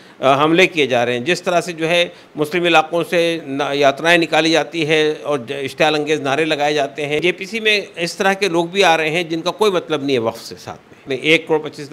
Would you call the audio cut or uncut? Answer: cut